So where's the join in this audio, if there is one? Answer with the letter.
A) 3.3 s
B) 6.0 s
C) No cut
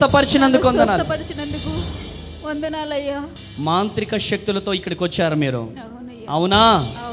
A